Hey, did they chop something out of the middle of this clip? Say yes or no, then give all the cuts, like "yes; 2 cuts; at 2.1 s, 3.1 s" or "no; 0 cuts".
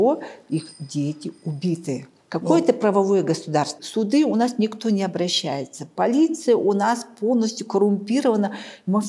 yes; 2 cuts; at 2.1 s, 3.8 s